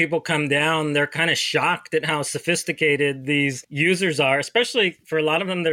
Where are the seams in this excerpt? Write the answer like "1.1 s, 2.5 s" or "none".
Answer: 3.6 s